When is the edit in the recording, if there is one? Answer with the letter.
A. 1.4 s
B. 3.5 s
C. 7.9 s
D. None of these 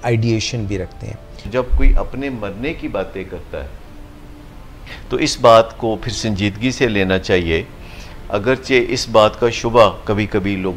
A